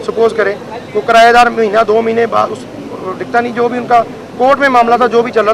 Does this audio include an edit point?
no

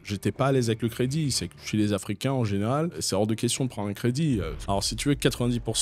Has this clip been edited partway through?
yes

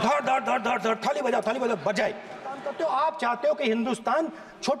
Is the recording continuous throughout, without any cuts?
no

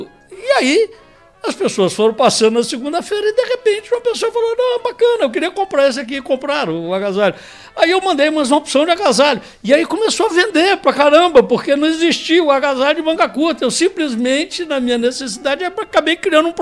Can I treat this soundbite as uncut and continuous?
yes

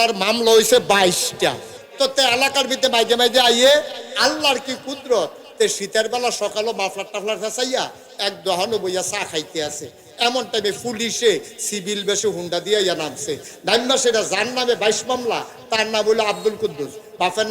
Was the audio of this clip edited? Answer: yes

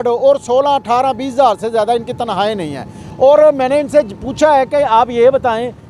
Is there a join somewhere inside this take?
no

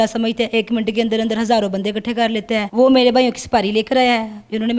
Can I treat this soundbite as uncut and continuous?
yes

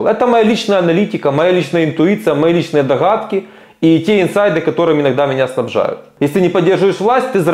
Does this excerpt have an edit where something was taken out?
yes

